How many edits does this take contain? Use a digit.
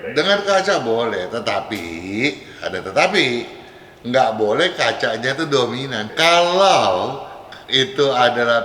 1